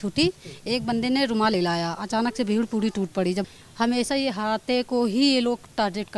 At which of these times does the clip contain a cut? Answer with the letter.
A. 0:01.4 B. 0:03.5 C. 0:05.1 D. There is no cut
B